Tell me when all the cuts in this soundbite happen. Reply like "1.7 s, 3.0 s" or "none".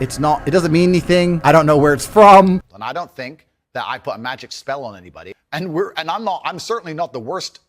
2.6 s